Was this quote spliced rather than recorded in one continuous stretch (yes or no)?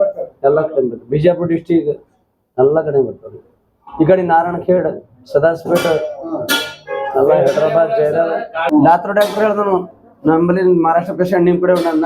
yes